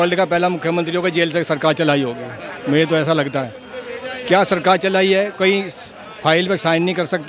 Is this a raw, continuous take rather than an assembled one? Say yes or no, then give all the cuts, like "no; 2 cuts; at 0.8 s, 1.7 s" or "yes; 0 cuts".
yes; 0 cuts